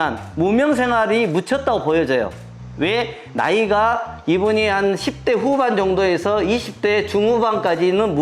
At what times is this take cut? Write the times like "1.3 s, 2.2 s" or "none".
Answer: none